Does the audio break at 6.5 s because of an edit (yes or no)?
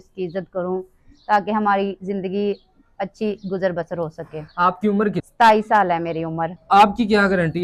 yes